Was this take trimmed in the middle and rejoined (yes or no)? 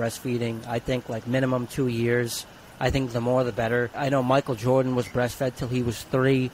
yes